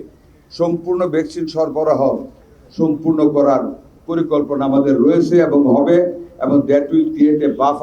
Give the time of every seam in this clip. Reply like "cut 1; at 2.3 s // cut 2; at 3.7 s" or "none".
none